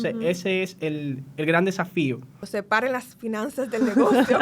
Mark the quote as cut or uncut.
cut